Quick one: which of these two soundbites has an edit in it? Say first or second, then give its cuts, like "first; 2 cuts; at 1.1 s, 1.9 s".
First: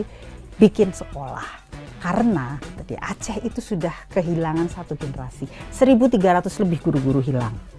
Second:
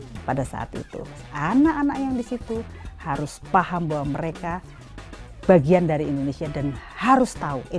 second; 1 cut; at 1.2 s